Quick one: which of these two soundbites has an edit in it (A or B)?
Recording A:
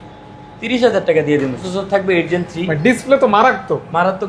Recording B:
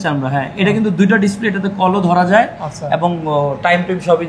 A